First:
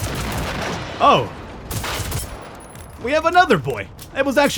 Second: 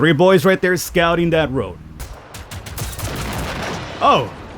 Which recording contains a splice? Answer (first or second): second